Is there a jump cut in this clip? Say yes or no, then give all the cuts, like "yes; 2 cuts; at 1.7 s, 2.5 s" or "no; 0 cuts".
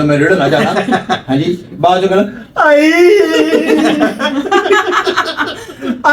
no; 0 cuts